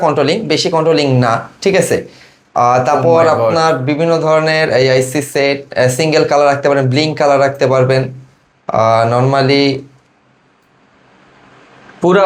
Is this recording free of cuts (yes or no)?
yes